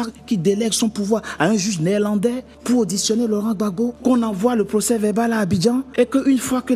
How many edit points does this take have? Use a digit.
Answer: 3